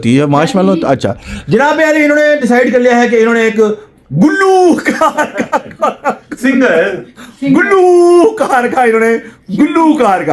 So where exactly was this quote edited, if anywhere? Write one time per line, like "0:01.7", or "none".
none